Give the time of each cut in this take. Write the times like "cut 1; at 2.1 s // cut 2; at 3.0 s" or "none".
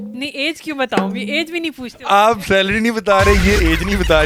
none

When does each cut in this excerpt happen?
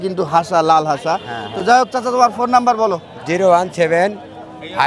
none

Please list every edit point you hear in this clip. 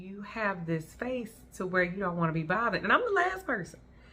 none

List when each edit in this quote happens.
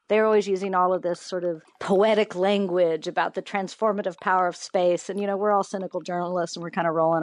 cut 1; at 1.7 s

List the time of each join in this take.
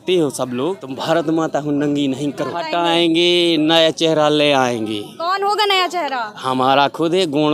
cut 1; at 0.9 s // cut 2; at 2.7 s

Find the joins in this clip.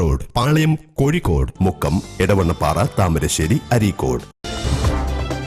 cut 1; at 4.4 s

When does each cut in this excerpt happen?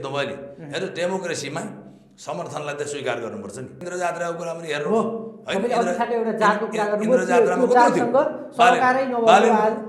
cut 1; at 3.8 s

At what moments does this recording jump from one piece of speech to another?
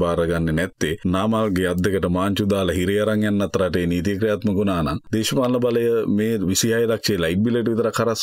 cut 1; at 1.0 s // cut 2; at 5.0 s

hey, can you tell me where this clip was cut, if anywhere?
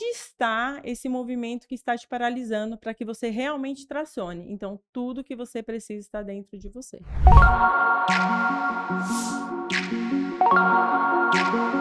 cut 1; at 7.1 s

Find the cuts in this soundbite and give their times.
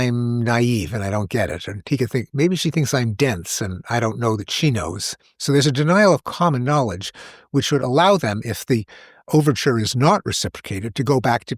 cut 1; at 8.5 s

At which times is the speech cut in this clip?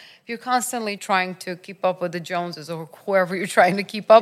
cut 1; at 1.0 s

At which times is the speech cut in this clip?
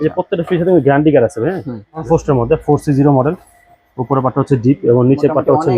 cut 1; at 2.0 s

